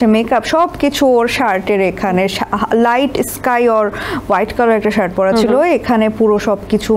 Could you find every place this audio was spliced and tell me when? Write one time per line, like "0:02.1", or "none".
none